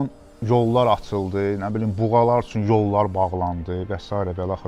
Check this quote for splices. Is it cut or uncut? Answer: uncut